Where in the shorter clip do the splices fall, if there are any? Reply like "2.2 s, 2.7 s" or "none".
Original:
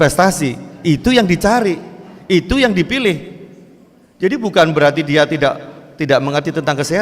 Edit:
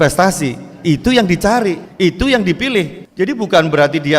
1.9 s, 3.0 s